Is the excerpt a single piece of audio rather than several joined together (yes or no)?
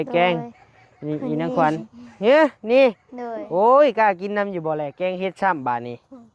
yes